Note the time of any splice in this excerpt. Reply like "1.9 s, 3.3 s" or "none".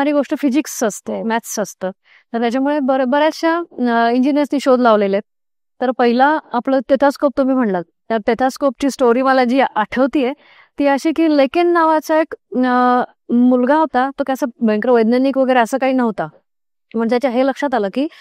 none